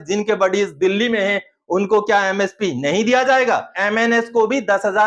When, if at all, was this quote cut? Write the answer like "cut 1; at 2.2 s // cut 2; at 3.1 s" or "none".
cut 1; at 3.7 s